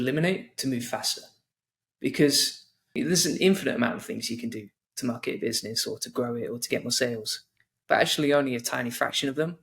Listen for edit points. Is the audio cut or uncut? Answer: cut